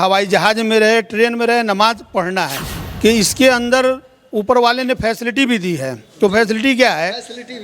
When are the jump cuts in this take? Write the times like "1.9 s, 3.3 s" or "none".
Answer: 2.6 s